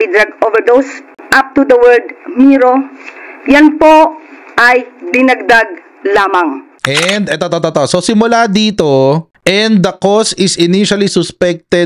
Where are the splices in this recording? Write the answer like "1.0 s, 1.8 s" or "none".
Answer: 6.7 s

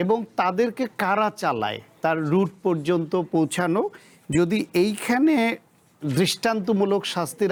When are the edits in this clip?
none

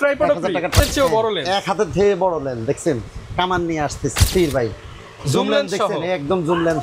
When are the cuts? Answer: 0.8 s, 4.2 s

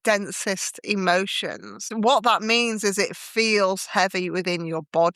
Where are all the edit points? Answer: 1.9 s

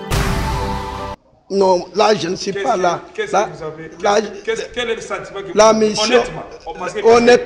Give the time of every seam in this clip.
1.1 s

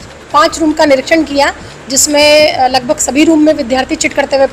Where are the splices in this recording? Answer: none

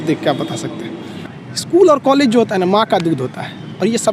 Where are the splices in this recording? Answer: 1.1 s

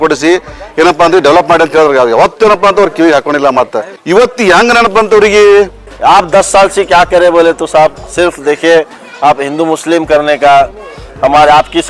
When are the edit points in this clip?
5.8 s

